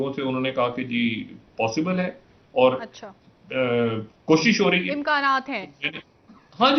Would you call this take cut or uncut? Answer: uncut